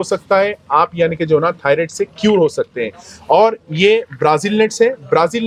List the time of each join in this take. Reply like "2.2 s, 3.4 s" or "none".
none